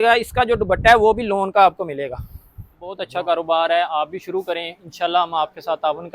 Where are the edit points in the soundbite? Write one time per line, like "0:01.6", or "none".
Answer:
0:02.9